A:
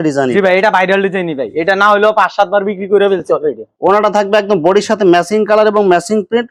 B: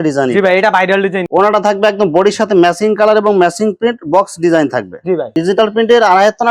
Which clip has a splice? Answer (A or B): B